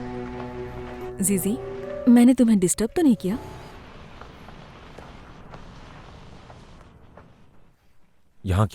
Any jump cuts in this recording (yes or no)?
yes